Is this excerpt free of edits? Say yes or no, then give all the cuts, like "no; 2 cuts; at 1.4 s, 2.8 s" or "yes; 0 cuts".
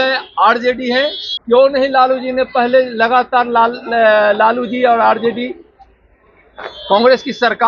no; 1 cut; at 1.3 s